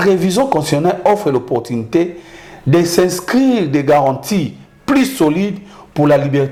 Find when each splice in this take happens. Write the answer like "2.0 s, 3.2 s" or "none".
none